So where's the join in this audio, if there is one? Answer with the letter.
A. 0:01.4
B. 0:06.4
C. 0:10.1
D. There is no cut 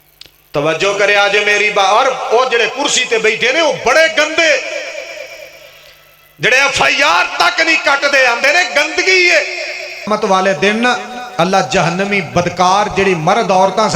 C